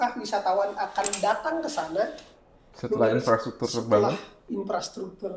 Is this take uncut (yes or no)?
yes